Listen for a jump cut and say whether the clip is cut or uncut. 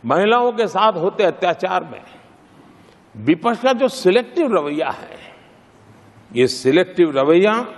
uncut